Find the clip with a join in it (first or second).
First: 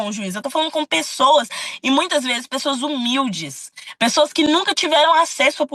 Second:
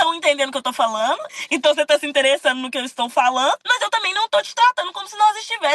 second